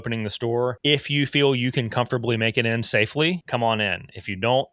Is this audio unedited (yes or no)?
no